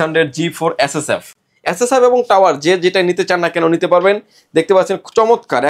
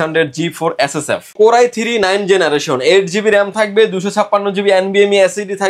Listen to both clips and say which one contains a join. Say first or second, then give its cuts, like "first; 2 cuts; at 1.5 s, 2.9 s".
second; 1 cut; at 1.3 s